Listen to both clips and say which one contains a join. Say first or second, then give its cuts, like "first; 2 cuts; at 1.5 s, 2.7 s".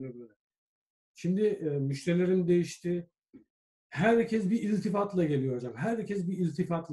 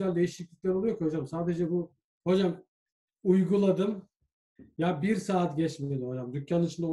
second; 1 cut; at 2.0 s